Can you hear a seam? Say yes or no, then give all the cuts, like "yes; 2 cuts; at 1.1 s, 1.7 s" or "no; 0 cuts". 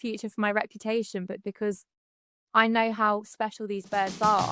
no; 0 cuts